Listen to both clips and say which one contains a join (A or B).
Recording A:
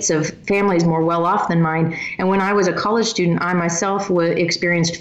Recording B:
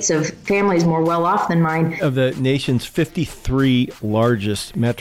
B